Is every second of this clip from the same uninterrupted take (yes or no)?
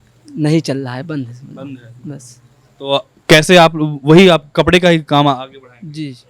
yes